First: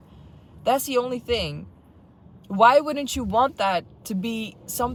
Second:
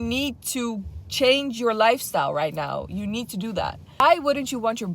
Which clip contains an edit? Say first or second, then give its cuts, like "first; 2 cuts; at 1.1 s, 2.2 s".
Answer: second; 1 cut; at 3.8 s